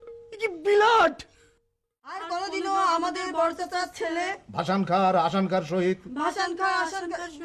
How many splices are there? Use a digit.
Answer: 1